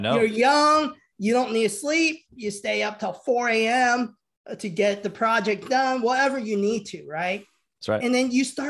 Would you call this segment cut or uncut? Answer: uncut